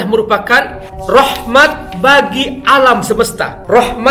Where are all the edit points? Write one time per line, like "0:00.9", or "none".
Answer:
none